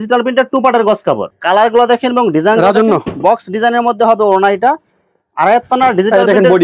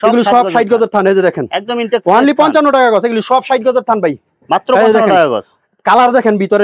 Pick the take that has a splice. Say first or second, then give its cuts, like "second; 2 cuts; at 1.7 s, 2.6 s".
first; 1 cut; at 1.3 s